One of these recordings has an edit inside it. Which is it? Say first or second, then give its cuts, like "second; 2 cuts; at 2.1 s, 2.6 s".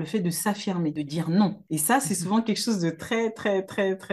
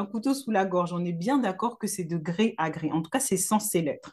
first; 2 cuts; at 0.9 s, 1.6 s